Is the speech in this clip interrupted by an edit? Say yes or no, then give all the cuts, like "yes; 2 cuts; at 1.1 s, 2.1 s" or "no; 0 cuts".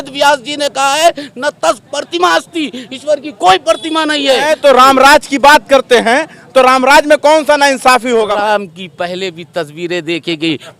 yes; 2 cuts; at 4.5 s, 8.3 s